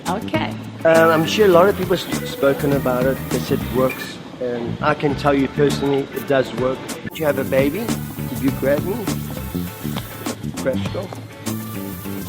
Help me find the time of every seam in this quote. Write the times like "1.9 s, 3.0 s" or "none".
7.2 s